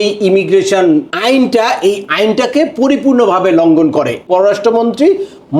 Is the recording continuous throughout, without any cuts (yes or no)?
no